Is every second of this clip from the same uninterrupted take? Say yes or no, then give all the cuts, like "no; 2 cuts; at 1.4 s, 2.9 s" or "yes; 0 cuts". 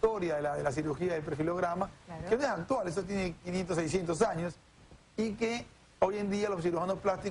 yes; 0 cuts